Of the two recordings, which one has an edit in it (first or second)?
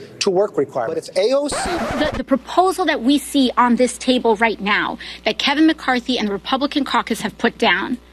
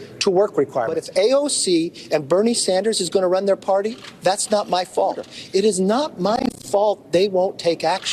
first